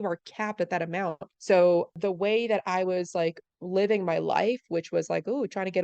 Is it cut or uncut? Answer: cut